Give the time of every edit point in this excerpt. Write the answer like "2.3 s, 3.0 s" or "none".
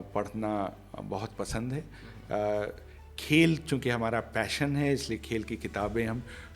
none